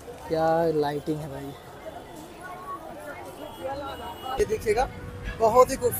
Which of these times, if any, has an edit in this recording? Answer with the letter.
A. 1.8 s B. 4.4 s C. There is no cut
B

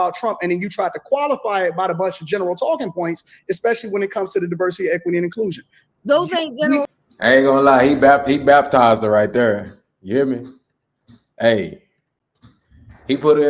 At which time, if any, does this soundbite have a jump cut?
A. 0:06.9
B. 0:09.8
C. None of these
A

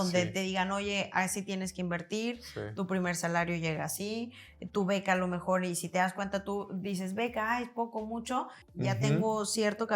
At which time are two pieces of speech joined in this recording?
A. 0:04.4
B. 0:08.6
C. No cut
B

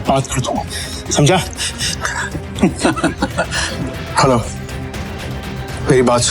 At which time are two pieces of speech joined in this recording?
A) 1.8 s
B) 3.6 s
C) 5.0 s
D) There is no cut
B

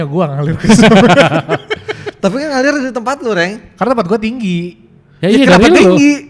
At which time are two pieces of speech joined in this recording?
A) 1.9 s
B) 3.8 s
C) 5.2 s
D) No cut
D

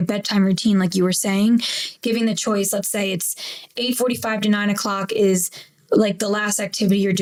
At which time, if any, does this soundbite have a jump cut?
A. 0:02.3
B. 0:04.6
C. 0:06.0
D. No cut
D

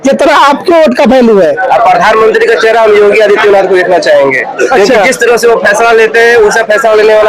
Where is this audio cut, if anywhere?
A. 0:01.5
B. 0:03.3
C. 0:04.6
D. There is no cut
A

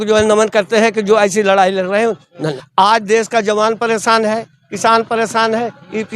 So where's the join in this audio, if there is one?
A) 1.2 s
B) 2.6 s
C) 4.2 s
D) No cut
B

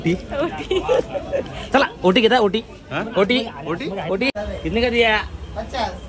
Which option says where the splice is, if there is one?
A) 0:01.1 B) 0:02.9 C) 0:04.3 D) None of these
C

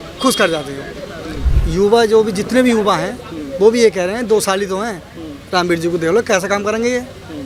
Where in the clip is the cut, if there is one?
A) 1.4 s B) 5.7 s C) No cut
A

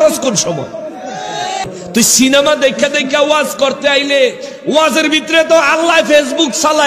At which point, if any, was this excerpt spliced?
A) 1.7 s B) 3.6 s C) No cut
A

